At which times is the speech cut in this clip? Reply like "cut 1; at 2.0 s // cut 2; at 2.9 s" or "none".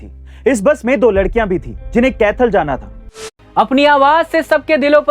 cut 1; at 3.3 s